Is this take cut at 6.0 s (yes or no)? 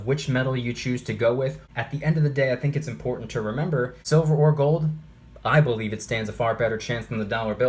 no